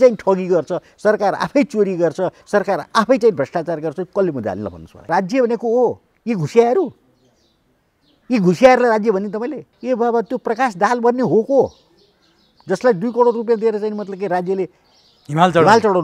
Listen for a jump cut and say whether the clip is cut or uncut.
cut